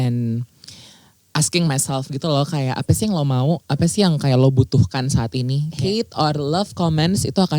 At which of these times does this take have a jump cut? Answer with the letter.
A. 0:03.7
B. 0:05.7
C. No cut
B